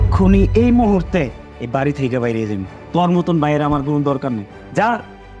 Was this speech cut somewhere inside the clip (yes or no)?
no